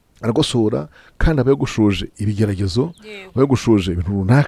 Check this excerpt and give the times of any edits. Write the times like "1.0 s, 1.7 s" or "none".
none